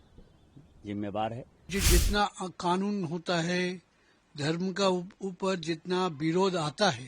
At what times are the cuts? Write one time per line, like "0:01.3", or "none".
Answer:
0:01.7